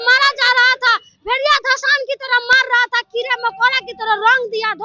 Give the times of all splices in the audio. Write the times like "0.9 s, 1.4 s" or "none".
none